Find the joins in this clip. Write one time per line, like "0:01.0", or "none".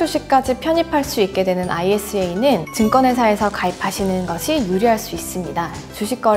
none